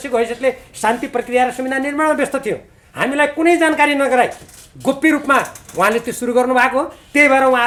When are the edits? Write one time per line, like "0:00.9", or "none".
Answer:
none